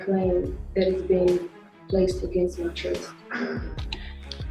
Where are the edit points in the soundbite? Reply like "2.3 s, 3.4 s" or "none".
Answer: none